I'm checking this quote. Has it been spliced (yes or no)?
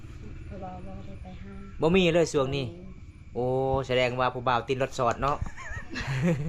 no